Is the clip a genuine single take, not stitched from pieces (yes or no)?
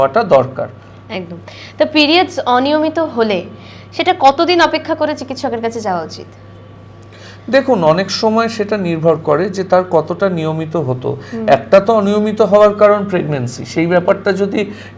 yes